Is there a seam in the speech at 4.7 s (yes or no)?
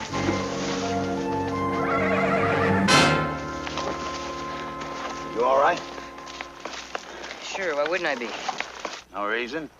yes